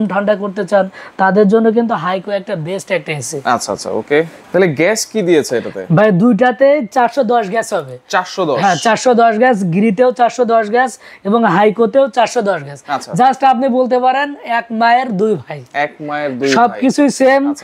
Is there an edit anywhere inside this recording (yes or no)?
no